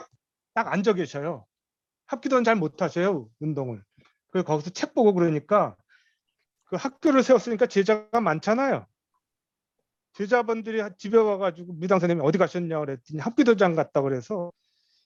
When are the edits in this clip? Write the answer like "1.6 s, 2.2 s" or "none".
none